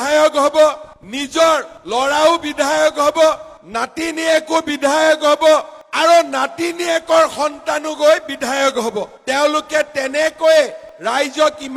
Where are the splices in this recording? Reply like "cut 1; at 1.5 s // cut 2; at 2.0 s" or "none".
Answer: none